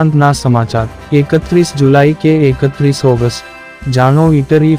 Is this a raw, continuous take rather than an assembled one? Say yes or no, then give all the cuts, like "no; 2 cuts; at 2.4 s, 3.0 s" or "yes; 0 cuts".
yes; 0 cuts